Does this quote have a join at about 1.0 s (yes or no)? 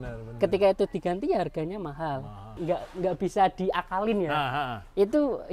no